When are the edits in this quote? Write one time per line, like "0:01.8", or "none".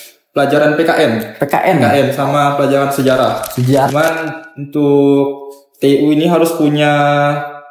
0:03.9